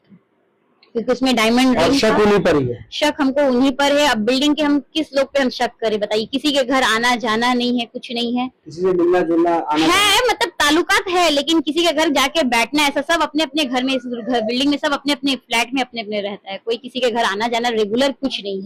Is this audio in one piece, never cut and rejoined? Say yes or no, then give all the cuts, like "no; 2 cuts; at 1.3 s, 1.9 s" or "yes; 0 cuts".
yes; 0 cuts